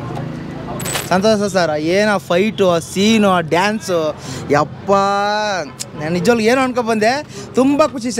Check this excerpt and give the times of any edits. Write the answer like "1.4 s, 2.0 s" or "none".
0.9 s